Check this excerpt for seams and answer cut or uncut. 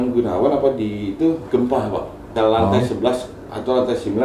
cut